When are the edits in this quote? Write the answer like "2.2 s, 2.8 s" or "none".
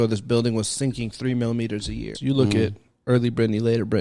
2.1 s